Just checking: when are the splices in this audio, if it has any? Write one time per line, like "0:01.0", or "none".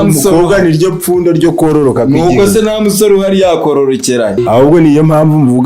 0:04.4